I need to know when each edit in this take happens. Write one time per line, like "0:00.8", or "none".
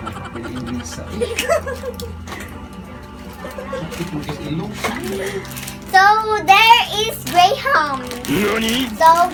none

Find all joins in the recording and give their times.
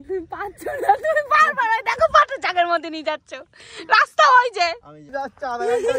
0:05.0

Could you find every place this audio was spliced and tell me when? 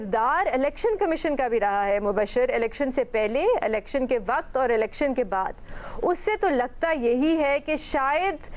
none

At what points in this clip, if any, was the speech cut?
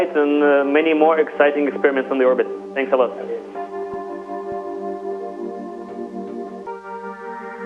0:06.7

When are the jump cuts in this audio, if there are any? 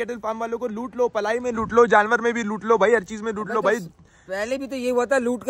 none

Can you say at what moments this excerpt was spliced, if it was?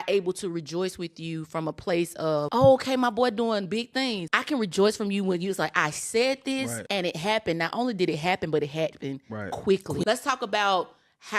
0:02.5
0:04.3
0:06.8
0:10.0

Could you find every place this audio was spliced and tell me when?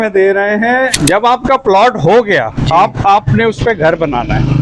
0:01.0

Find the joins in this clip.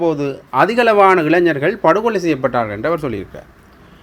none

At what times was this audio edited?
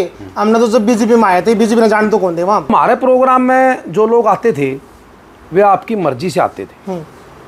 0:02.7

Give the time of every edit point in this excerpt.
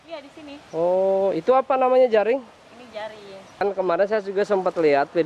0:03.6

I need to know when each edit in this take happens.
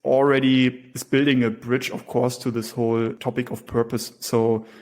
0:00.9
0:03.2

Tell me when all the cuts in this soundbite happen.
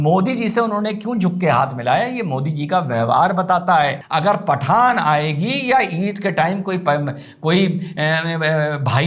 0:04.0

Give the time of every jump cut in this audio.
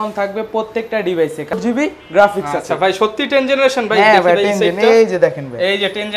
0:01.5

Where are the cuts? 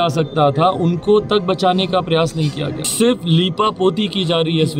0:02.8

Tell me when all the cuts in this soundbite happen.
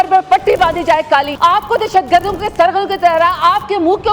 0:01.3

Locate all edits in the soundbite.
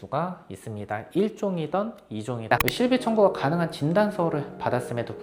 0:02.5

